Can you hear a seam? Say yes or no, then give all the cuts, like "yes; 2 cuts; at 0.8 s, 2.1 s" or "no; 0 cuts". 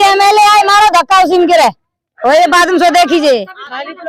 no; 0 cuts